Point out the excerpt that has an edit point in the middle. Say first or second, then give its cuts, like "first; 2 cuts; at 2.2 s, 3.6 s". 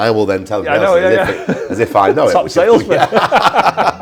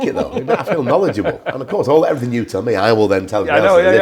second; 1 cut; at 1.5 s